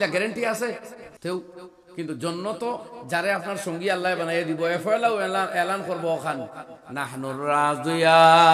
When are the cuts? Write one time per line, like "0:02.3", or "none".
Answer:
0:01.0

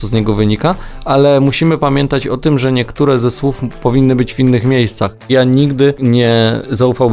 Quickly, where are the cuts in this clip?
0:05.3
0:06.0

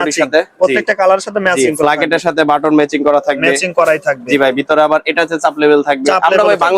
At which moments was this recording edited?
none

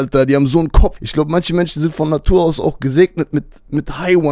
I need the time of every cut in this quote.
0:01.0

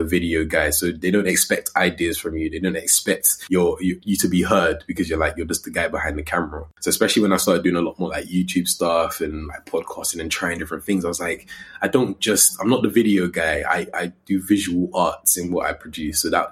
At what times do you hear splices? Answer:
0:03.3
0:06.7

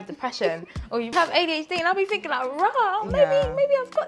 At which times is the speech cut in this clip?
0:01.1

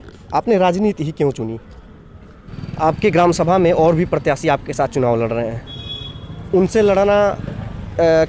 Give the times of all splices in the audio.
0:02.5
0:05.6

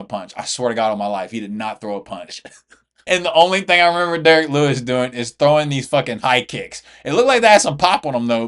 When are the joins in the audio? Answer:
none

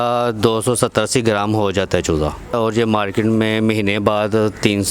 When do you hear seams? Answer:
0:02.6

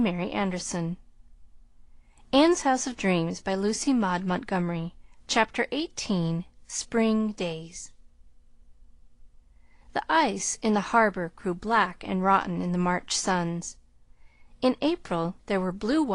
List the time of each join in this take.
none

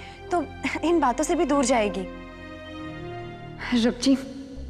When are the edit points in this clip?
0:02.9

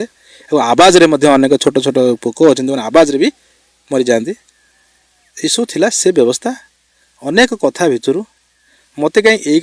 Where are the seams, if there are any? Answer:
none

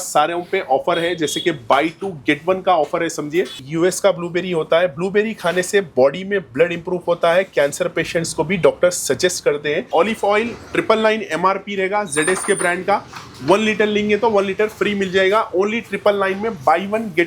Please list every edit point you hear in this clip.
0:03.6
0:09.9

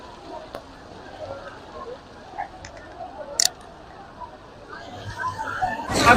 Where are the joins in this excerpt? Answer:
none

